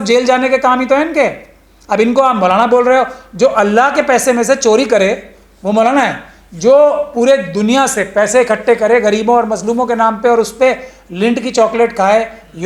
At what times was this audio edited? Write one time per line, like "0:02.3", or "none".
none